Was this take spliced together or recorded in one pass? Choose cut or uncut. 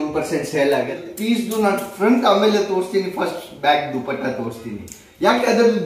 cut